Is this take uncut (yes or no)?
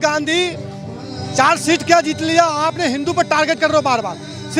yes